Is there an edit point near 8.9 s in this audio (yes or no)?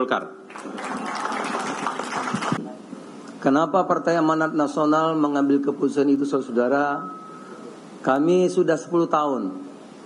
no